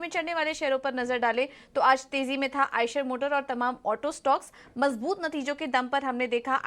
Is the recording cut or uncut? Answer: cut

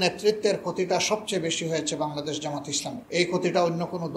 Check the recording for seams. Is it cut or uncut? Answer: cut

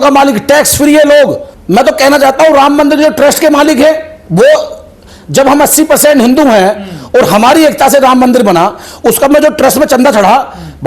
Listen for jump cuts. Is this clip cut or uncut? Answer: uncut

